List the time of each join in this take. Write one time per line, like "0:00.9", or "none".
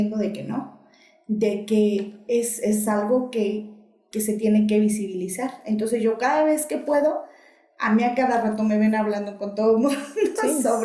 none